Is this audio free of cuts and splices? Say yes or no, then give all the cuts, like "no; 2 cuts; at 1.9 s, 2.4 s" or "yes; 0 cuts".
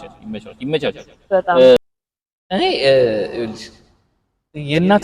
no; 1 cut; at 1.8 s